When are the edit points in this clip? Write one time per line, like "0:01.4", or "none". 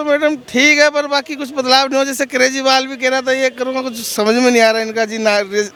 none